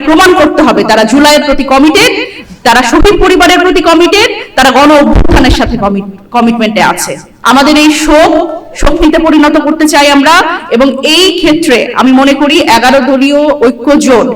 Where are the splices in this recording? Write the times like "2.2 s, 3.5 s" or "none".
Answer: 7.3 s